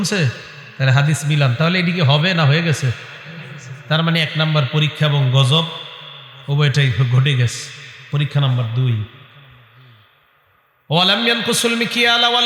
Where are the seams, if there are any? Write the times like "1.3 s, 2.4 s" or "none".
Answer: none